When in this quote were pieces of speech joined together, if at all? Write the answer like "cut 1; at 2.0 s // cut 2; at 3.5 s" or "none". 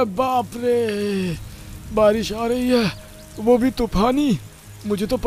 none